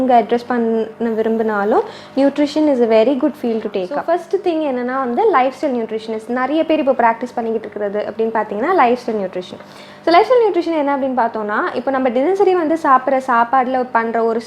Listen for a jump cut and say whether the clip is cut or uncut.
cut